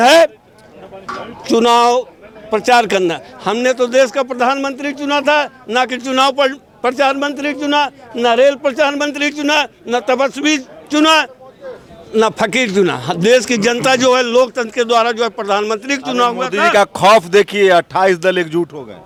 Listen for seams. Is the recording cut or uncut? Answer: uncut